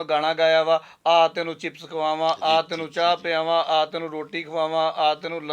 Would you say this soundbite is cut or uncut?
uncut